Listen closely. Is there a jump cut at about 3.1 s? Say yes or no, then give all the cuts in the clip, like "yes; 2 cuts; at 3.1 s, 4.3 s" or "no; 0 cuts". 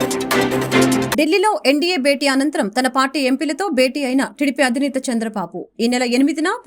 no; 1 cut; at 1.1 s